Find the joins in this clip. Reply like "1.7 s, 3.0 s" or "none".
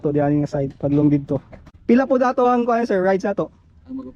1.6 s